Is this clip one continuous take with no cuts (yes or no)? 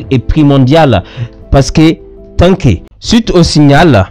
no